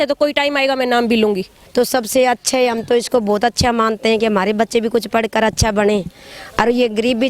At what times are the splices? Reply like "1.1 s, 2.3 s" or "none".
1.6 s